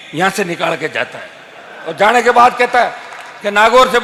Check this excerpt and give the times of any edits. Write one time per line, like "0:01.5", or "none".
none